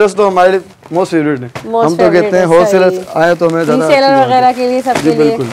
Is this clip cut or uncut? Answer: uncut